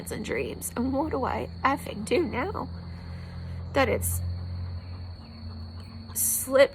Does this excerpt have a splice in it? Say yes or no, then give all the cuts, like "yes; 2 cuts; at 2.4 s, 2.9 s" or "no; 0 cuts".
no; 0 cuts